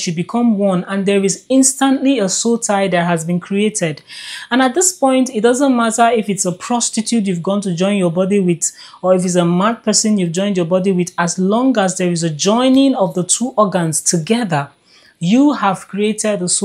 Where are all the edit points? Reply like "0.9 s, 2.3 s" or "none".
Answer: none